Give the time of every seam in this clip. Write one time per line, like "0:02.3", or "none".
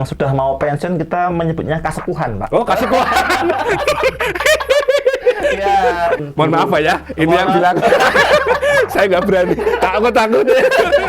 0:06.2